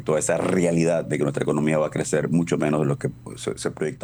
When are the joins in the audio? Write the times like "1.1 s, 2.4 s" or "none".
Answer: none

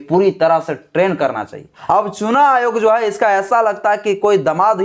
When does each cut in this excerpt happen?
1.8 s

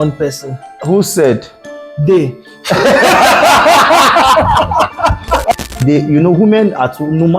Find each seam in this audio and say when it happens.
5.5 s

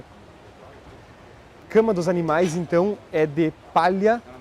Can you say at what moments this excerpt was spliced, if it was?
1.7 s

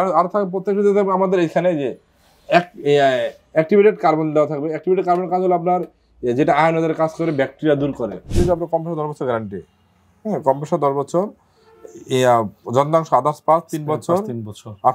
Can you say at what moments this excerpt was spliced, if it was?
8.3 s

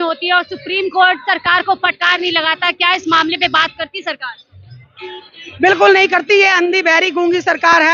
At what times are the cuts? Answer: none

